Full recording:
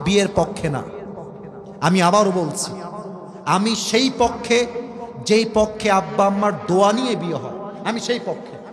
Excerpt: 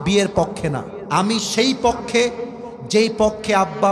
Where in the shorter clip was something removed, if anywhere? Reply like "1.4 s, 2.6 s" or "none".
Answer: 0.9 s